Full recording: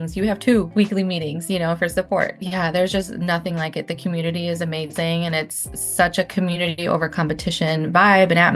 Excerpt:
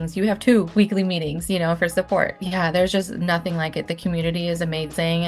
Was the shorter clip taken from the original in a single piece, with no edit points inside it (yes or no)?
yes